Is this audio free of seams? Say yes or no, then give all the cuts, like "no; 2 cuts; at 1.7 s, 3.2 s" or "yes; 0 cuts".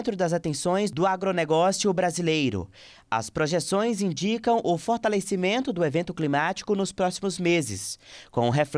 yes; 0 cuts